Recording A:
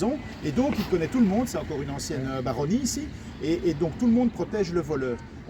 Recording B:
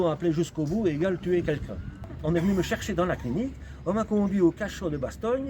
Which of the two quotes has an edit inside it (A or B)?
B